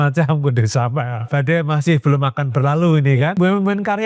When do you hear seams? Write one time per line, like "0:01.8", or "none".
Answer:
0:01.3
0:03.3